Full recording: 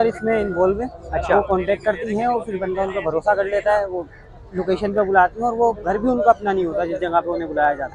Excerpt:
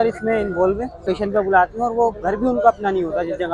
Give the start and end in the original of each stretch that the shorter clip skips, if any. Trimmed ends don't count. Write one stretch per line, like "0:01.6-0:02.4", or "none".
0:01.0-0:04.6